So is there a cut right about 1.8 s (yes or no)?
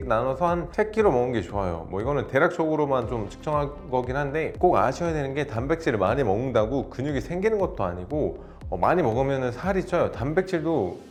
no